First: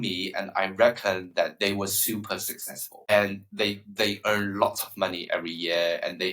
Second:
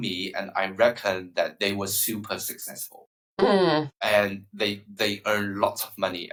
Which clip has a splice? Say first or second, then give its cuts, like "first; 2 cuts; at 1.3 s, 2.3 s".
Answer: first; 1 cut; at 3.0 s